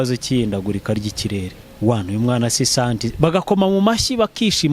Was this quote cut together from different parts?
yes; 1 cut; at 1.6 s

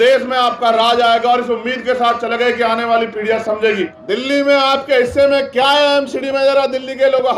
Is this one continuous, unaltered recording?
no; 1 cut; at 3.9 s

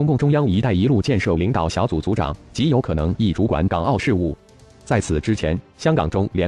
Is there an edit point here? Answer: no; 0 cuts

